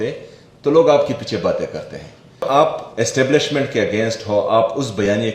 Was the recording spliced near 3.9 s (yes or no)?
no